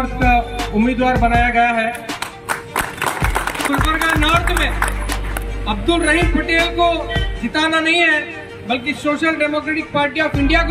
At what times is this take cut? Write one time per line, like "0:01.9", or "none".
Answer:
0:03.7